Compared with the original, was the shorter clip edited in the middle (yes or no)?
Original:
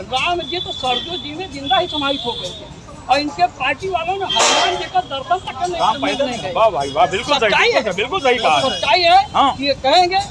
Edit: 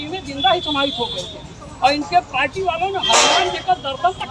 no